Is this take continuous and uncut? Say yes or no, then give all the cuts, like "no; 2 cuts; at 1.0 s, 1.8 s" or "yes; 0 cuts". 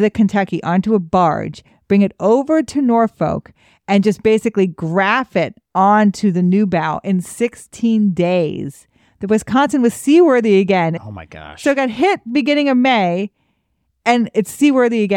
no; 1 cut; at 10.9 s